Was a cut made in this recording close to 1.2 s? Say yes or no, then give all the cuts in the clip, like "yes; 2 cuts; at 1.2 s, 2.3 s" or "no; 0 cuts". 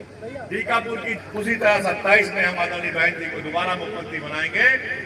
yes; 1 cut; at 1.2 s